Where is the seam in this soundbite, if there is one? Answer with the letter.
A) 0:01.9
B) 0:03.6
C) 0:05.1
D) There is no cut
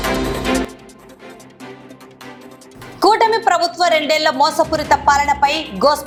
D